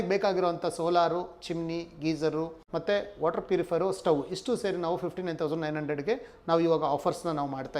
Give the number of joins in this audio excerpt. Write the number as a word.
one